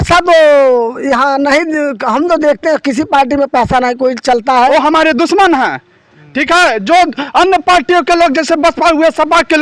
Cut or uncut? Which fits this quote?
cut